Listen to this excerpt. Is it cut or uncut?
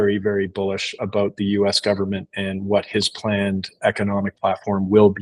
uncut